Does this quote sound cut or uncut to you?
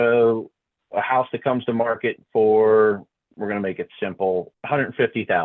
cut